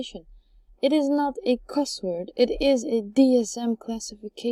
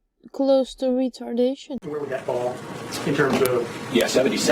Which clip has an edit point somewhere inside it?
second; 1 cut; at 2.1 s

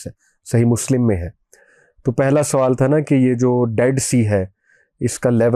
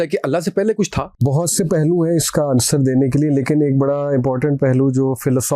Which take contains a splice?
second; 1 cut; at 1.2 s

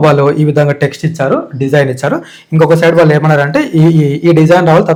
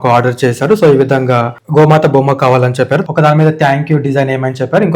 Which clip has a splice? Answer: second; 2 cuts; at 1.6 s, 3.0 s

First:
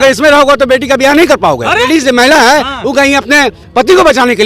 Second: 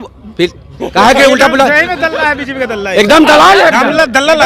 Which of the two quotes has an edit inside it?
first; 1 cut; at 1.8 s

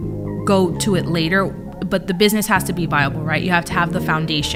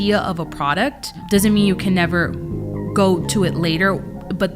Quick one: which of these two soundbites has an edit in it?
second; 1 cut; at 1.2 s

